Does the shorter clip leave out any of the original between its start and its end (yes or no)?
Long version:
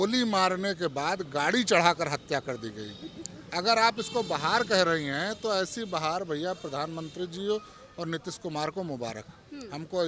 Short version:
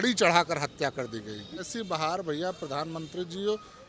yes